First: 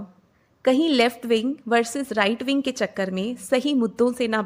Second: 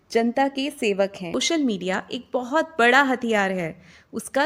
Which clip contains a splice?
second; 1 cut; at 1.3 s

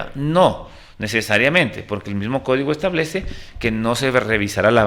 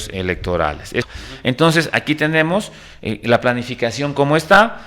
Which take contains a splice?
second; 1 cut; at 1.0 s

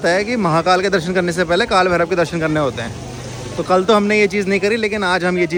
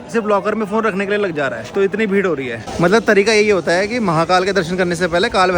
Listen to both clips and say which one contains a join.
second; 2 cuts; at 1.6 s, 2.6 s

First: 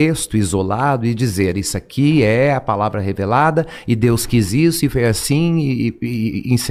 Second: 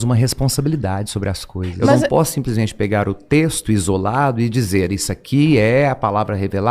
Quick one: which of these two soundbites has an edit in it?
second; 1 cut; at 2.1 s

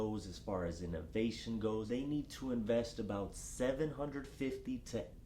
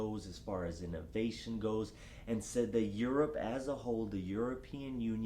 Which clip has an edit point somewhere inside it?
first; 1 cut; at 1.9 s

